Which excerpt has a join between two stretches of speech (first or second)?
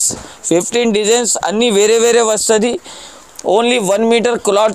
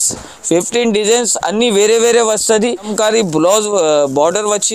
second